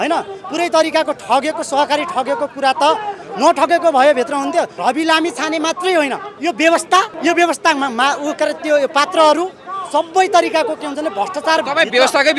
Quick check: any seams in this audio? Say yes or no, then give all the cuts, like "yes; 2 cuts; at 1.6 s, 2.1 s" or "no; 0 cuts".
yes; 3 cuts; at 4.7 s, 6.3 s, 7.1 s